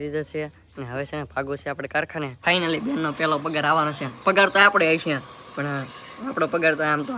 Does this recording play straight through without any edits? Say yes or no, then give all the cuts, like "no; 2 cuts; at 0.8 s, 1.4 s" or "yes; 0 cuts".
no; 1 cut; at 2.3 s